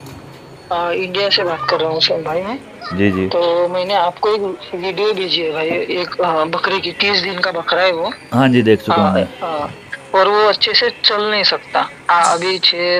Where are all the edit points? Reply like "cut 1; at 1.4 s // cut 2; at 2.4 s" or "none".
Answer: none